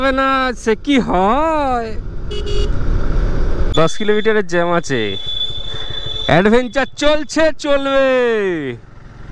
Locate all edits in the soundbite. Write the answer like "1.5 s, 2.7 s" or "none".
none